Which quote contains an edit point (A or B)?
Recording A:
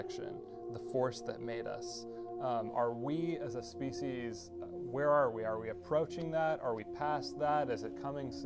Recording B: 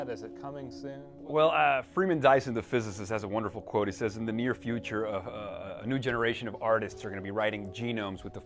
A